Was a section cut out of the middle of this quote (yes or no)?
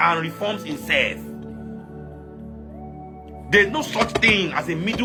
no